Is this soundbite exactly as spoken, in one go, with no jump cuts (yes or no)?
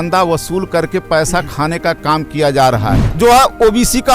no